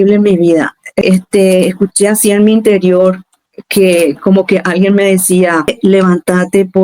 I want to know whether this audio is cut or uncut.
cut